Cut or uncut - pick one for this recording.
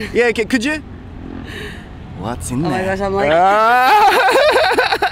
uncut